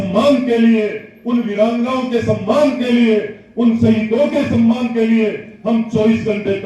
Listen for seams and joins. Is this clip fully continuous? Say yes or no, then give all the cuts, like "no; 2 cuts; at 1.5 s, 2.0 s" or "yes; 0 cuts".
yes; 0 cuts